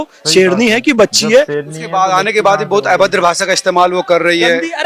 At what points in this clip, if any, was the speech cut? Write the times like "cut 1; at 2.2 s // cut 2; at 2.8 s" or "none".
cut 1; at 1.6 s